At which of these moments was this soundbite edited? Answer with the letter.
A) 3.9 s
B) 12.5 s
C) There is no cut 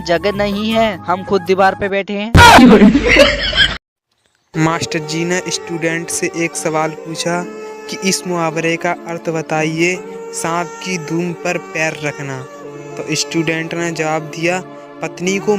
A